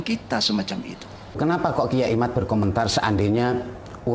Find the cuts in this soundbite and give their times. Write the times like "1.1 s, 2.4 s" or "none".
1.4 s